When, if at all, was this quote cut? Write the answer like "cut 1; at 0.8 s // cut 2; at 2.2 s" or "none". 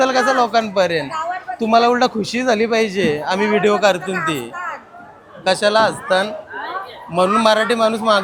none